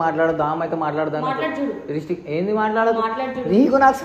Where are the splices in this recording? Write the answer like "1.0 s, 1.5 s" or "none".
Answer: none